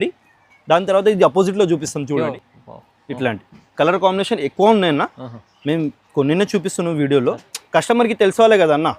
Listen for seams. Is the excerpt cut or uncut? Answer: cut